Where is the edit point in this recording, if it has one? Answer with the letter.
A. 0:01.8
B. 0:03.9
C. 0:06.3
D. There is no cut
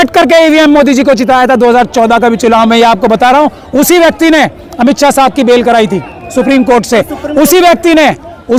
D